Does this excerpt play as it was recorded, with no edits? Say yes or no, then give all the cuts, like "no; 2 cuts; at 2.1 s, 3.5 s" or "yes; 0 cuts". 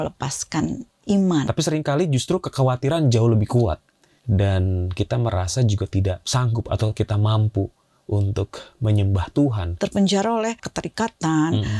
no; 2 cuts; at 1.5 s, 9.7 s